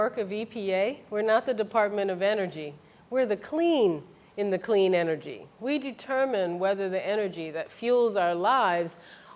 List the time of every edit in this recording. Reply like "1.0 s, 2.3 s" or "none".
2.7 s